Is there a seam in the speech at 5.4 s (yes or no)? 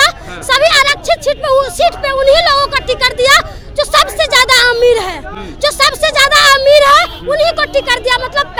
no